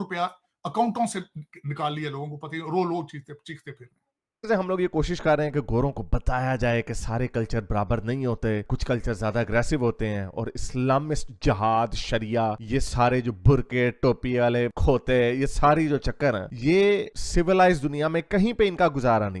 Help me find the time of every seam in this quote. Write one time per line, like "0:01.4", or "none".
0:04.5